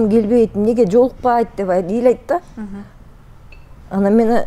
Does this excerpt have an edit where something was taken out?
no; 0 cuts

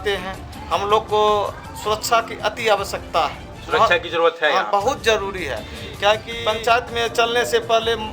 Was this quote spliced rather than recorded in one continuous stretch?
yes; 1 cut; at 6.3 s

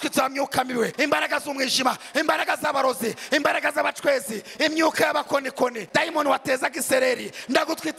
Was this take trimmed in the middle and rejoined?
yes; 2 cuts; at 0.9 s, 5.8 s

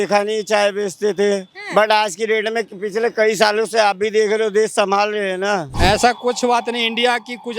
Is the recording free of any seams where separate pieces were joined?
no; 1 cut; at 5.7 s

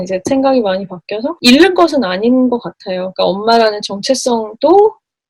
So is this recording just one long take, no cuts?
no; 1 cut; at 1.4 s

